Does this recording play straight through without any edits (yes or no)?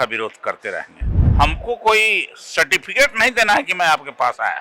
no